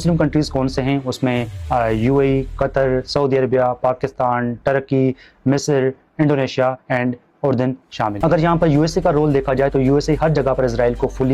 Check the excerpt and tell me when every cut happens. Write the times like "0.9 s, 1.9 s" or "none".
8.2 s